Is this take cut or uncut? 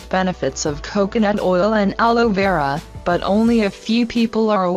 cut